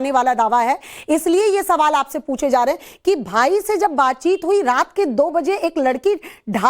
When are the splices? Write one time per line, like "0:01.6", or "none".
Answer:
0:02.3